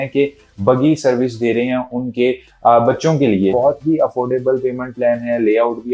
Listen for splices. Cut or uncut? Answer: cut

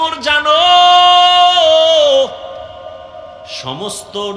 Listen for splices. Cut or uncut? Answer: uncut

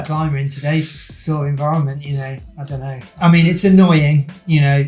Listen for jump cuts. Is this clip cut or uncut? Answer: cut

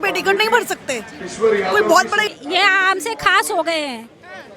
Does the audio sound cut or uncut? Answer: cut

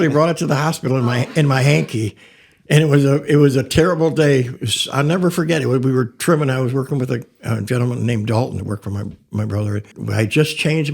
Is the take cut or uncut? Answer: cut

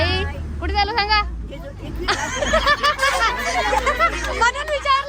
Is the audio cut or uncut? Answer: uncut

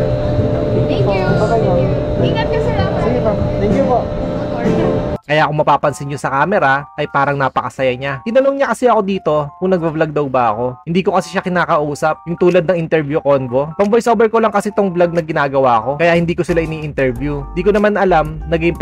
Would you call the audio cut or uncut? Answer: uncut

